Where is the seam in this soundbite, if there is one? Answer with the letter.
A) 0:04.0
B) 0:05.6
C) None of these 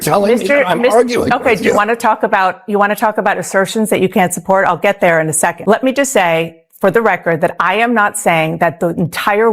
B